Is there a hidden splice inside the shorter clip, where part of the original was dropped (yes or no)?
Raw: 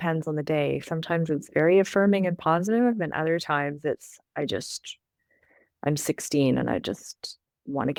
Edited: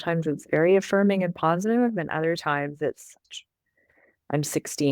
yes